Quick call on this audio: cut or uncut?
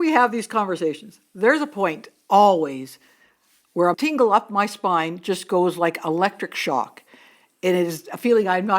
cut